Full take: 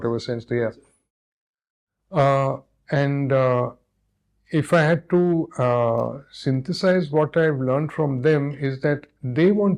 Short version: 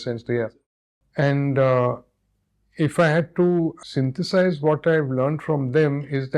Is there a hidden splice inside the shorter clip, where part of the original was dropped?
yes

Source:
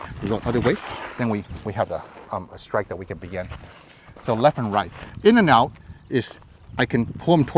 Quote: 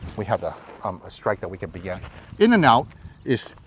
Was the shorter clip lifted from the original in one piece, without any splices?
no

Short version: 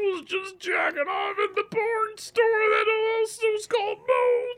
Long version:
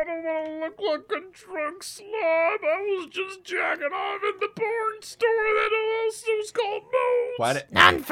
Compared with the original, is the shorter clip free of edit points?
yes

